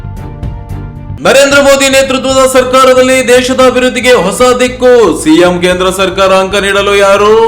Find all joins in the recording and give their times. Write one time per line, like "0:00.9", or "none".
0:01.1